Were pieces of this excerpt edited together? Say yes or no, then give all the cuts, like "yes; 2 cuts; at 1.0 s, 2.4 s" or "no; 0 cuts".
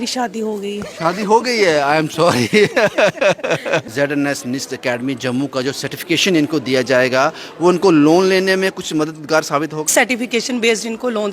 yes; 2 cuts; at 3.9 s, 9.9 s